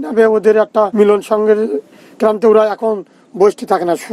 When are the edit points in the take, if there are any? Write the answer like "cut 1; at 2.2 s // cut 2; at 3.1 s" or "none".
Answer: cut 1; at 0.9 s